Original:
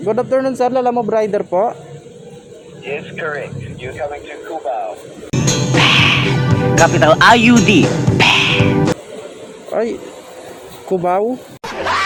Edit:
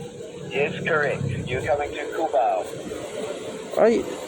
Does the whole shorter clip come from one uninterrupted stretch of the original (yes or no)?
no